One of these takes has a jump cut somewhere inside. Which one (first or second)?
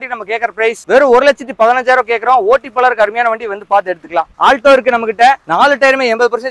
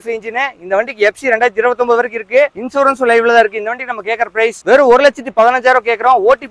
first